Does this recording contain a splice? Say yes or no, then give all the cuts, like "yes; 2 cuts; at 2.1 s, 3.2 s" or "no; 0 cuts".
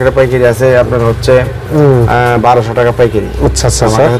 no; 0 cuts